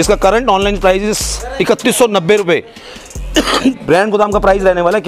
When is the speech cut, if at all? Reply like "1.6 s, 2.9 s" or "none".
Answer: none